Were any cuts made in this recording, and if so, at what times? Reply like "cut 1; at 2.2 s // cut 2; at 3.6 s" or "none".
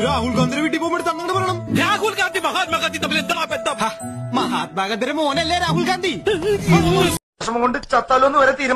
cut 1; at 7.3 s